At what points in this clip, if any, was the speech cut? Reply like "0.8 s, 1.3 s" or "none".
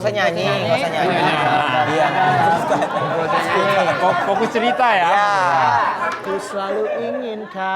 none

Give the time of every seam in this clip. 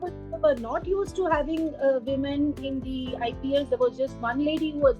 none

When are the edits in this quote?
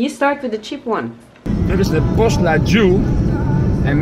1.5 s

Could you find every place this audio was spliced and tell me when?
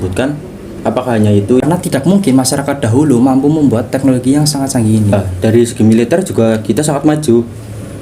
1.6 s, 5.1 s

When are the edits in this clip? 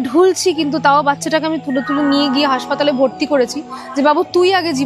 none

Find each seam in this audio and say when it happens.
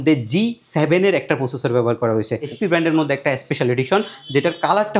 2.5 s

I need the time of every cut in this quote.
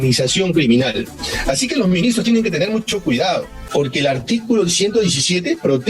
3.6 s

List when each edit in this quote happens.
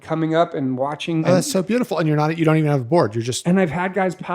1.2 s

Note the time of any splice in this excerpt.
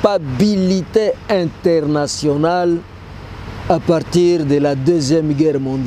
none

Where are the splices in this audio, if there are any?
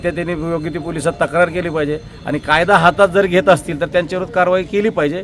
none

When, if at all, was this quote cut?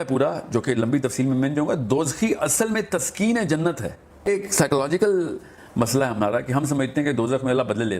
4.2 s

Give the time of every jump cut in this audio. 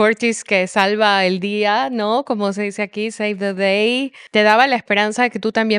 4.2 s

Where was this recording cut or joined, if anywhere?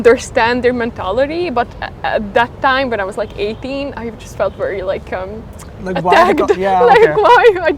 none

